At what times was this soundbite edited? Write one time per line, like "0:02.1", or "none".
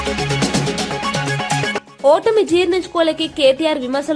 0:01.5